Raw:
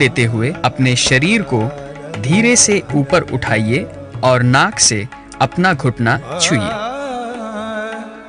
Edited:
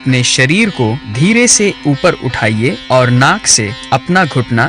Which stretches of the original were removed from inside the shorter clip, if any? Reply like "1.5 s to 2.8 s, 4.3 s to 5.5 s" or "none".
1.8 s to 2.1 s, 3.9 s to 4.1 s, 5.1 s to 5.2 s